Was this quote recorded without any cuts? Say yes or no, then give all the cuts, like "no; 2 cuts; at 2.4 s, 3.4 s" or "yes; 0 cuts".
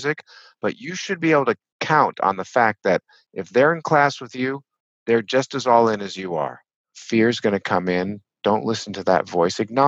no; 1 cut; at 6.9 s